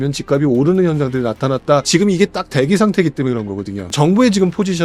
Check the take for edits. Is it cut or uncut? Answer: cut